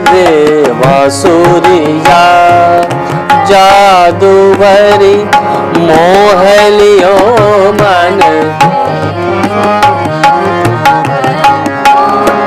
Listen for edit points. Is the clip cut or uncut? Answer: uncut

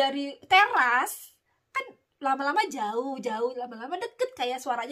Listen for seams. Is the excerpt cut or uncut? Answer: uncut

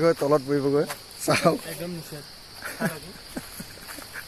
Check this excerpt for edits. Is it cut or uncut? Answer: uncut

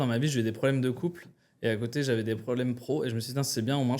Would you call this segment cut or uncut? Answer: uncut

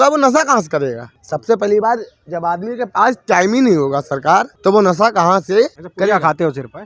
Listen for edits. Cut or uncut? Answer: cut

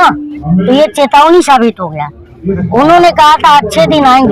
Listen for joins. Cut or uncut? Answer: uncut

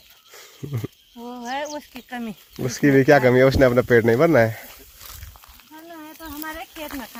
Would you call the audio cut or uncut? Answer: uncut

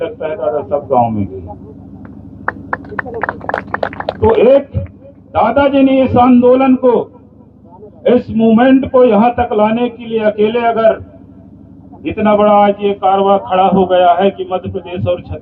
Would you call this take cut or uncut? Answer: uncut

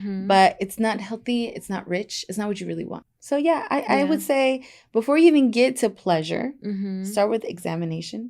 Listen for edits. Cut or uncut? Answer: cut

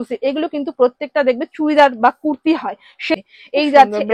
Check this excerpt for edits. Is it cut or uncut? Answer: cut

